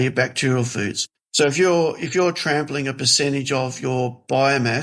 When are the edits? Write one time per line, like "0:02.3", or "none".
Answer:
none